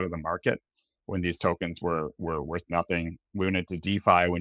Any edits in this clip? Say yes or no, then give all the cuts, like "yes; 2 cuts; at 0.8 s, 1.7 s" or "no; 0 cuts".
no; 0 cuts